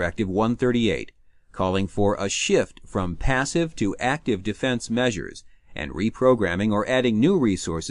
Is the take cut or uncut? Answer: cut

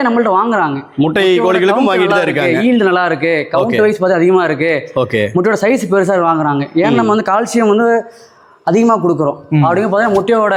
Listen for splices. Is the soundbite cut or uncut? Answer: uncut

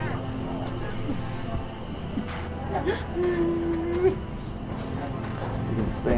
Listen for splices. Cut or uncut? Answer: cut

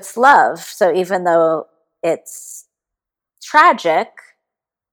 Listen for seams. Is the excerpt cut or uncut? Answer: uncut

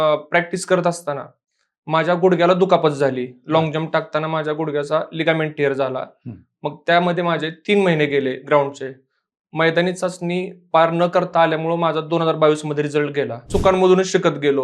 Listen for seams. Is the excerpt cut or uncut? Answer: cut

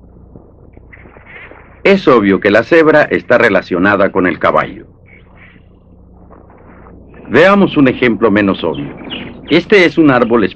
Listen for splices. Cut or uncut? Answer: cut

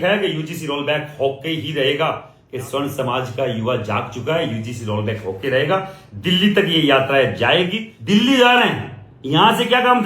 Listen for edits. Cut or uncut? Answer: cut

